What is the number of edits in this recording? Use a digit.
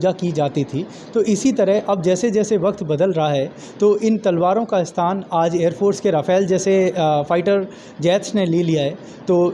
0